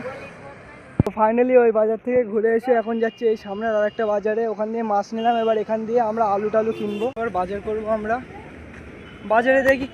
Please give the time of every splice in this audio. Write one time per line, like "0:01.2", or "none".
0:07.2